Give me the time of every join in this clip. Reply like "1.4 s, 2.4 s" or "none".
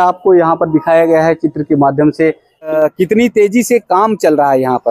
2.5 s